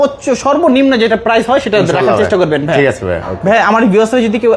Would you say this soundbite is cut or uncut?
uncut